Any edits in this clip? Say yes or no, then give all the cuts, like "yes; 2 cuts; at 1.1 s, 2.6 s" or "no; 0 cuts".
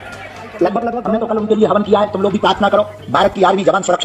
yes; 1 cut; at 1.0 s